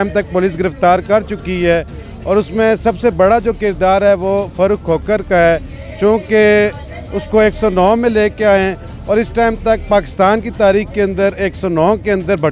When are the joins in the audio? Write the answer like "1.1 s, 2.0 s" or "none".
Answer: none